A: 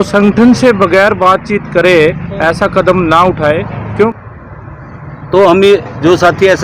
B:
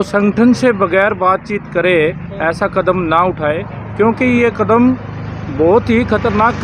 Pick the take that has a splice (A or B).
A